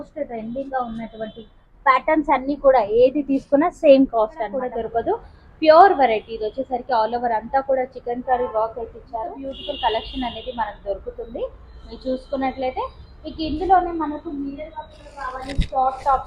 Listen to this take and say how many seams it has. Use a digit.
2